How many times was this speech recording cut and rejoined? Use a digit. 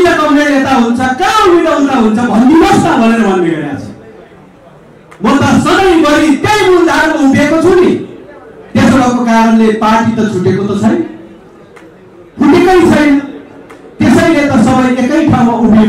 0